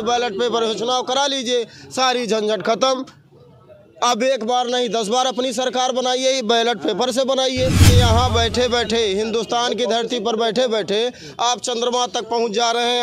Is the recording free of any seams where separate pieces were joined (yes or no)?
no